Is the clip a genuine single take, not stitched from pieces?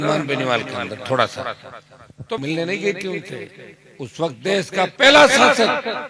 no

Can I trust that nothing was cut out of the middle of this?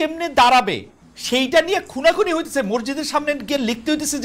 yes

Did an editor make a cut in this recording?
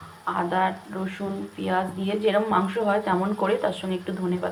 no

